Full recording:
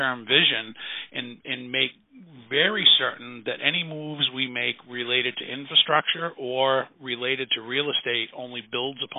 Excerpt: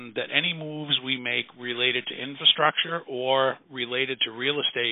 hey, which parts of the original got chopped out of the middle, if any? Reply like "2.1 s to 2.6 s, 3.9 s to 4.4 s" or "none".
none